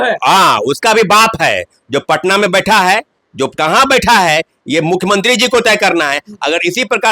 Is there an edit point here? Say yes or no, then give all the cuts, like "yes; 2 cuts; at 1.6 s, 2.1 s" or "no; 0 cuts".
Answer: no; 0 cuts